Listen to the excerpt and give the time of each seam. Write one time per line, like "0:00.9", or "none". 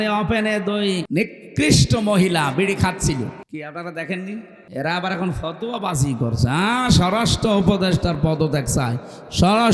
0:01.1
0:03.4
0:04.6